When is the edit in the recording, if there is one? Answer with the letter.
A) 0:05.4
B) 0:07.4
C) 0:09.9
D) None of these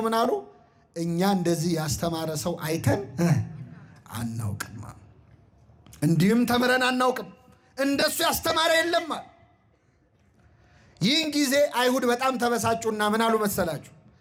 D